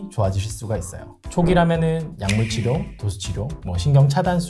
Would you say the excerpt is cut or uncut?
uncut